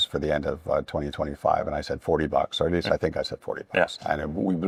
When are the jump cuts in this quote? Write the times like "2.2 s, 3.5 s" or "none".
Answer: none